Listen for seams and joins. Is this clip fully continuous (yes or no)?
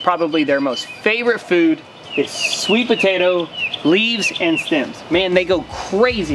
yes